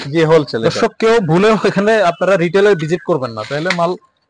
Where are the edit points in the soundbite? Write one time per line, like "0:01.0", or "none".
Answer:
none